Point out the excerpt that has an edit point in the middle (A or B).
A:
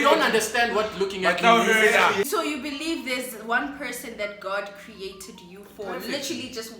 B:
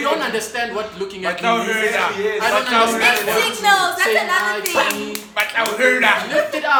A